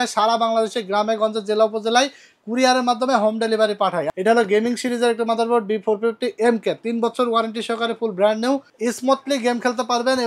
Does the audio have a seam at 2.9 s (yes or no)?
no